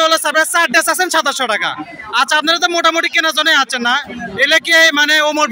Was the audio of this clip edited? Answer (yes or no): no